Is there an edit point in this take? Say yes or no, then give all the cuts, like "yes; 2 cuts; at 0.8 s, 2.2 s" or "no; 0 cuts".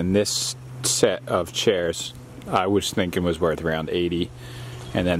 no; 0 cuts